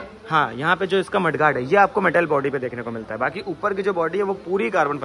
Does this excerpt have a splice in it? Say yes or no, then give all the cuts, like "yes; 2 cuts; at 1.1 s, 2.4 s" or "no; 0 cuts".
no; 0 cuts